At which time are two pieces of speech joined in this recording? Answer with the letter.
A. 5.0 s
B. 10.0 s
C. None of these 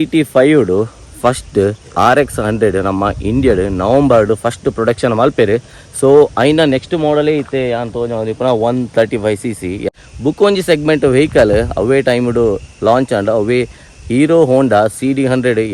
B